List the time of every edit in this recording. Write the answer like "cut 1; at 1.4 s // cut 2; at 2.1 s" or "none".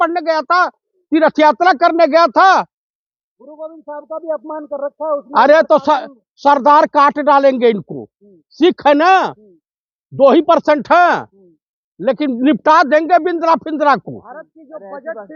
none